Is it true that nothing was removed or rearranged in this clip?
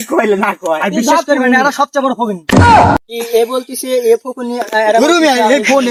yes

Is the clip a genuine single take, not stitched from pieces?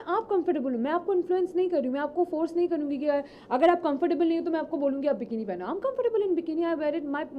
yes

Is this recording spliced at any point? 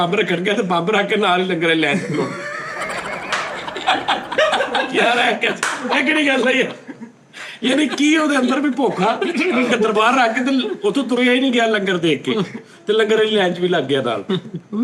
no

